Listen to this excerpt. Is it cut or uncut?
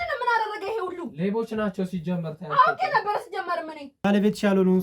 cut